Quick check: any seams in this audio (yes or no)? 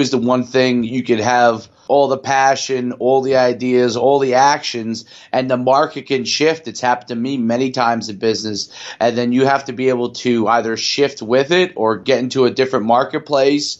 yes